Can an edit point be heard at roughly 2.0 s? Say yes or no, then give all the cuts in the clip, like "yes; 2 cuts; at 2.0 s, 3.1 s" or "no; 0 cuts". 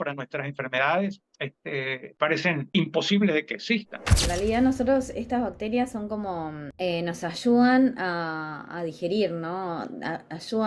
yes; 4 cuts; at 2.0 s, 2.7 s, 4.1 s, 6.6 s